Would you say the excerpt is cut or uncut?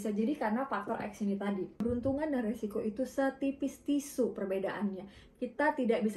cut